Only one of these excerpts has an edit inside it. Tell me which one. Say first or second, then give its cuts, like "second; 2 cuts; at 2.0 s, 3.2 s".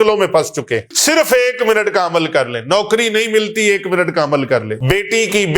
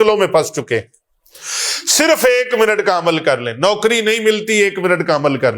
first; 2 cuts; at 0.9 s, 4.7 s